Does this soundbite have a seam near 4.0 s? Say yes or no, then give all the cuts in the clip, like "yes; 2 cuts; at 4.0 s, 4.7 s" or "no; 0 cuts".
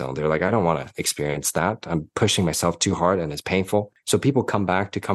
yes; 1 cut; at 4.0 s